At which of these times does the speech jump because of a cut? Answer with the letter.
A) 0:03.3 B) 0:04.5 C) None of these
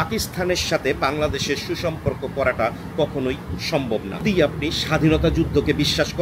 B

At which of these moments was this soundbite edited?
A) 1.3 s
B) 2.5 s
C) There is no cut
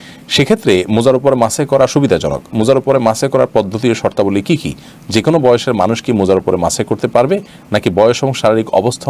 C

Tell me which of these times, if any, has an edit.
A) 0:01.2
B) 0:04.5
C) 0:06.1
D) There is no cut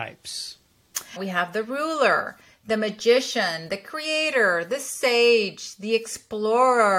A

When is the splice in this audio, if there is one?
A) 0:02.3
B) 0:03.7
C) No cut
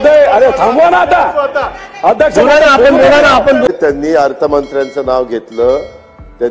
B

